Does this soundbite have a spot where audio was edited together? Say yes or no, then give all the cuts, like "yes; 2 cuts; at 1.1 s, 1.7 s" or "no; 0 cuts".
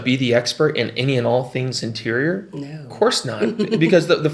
no; 0 cuts